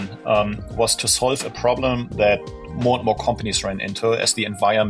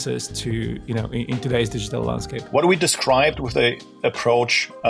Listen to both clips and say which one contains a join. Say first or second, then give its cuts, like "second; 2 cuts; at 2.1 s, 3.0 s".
second; 1 cut; at 2.3 s